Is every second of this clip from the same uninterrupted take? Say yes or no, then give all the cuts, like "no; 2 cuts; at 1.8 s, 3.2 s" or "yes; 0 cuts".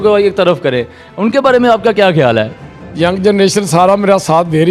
no; 1 cut; at 2.6 s